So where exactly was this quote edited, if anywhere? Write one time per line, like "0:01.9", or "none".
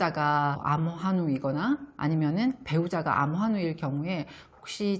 none

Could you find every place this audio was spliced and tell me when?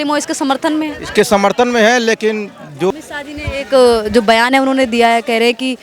0:02.9

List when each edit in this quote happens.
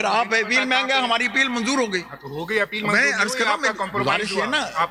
none

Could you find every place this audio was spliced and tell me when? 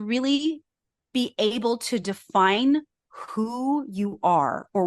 none

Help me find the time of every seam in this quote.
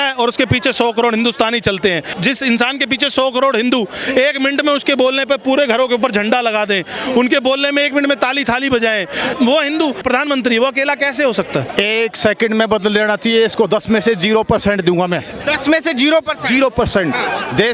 0:02.1
0:09.3
0:10.0
0:11.7

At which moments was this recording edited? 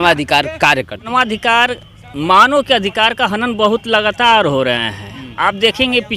0:01.1

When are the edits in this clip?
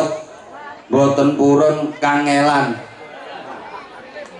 none

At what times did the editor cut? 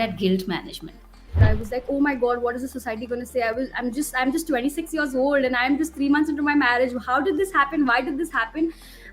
0:01.4

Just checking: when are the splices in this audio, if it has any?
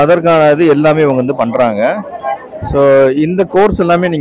none

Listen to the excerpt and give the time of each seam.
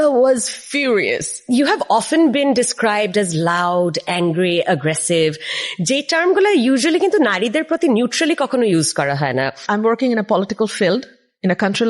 0:01.3
0:09.6

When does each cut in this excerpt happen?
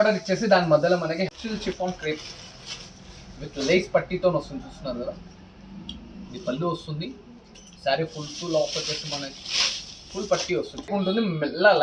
0:01.3
0:10.9

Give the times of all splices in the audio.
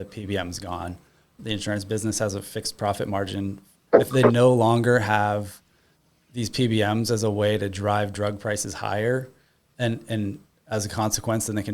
0:01.4
0:03.7

